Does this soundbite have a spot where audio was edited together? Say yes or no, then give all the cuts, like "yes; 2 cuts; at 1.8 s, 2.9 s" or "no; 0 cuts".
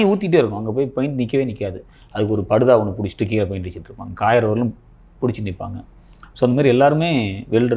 no; 0 cuts